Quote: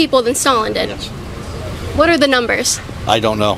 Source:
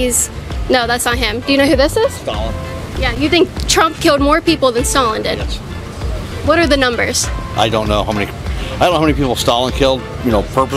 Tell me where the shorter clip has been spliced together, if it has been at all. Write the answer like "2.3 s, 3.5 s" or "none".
none